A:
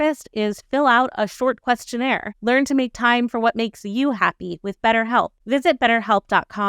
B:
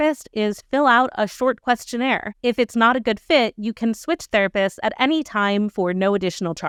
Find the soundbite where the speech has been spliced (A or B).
A